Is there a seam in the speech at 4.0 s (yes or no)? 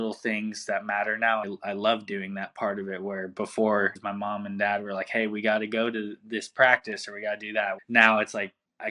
yes